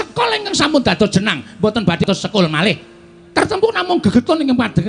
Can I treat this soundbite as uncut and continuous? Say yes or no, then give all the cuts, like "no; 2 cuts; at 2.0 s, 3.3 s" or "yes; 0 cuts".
no; 1 cut; at 2.0 s